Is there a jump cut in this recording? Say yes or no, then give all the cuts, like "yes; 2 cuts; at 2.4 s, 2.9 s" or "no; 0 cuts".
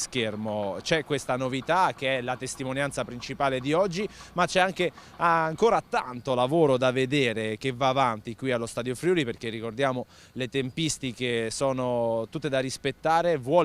yes; 1 cut; at 7.4 s